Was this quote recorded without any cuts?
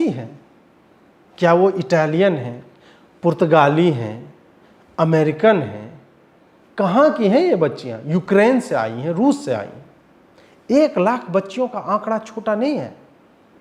yes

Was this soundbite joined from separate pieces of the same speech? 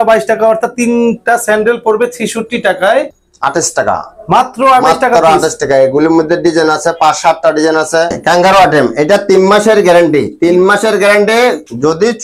yes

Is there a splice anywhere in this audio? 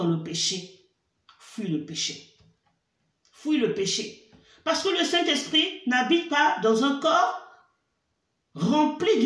no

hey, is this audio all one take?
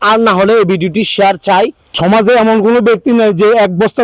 no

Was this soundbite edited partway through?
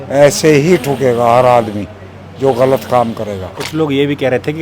yes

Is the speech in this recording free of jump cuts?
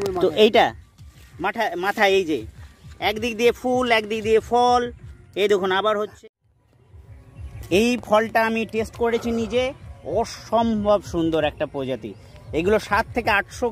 no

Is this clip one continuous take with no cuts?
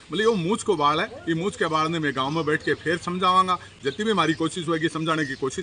yes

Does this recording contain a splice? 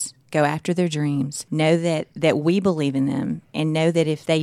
yes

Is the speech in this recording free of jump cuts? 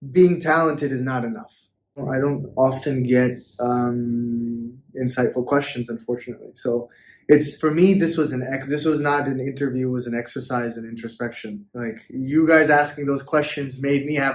no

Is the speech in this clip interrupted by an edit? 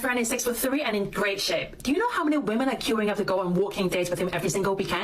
yes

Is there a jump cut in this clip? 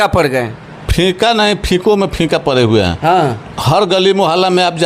no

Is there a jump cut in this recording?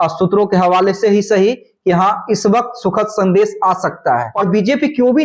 yes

